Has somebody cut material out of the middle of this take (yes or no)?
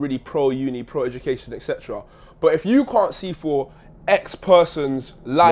no